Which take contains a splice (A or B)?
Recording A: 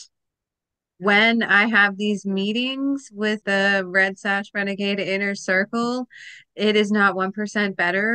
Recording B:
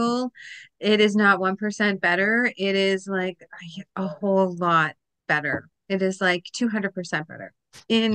A